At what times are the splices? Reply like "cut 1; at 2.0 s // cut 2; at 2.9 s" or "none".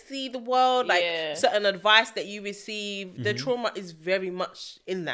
none